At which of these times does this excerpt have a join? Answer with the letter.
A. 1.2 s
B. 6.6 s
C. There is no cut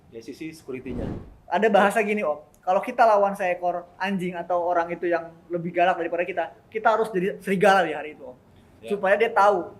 A